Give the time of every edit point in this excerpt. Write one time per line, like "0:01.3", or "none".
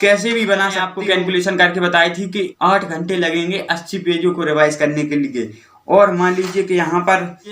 0:01.0